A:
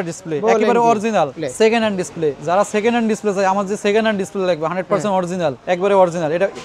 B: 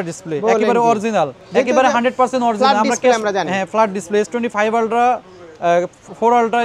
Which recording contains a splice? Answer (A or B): A